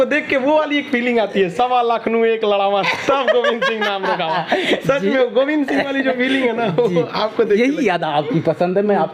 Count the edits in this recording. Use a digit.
0